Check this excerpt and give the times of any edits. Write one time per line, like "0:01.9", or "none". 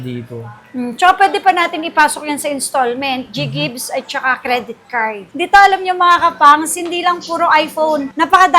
0:05.4